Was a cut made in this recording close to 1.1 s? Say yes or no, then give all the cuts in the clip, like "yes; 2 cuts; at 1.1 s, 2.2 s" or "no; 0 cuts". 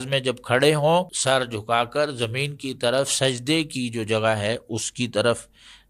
yes; 1 cut; at 1.1 s